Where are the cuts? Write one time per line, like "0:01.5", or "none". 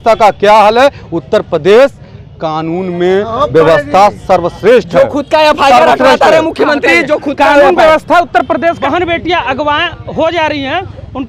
0:08.8